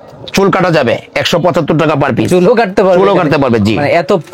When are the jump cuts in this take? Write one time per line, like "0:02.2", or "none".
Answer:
none